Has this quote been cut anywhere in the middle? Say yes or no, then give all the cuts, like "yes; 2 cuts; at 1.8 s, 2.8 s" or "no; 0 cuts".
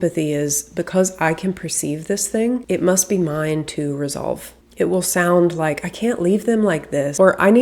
no; 0 cuts